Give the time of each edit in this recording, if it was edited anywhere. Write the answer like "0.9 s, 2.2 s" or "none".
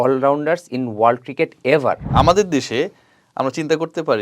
2.0 s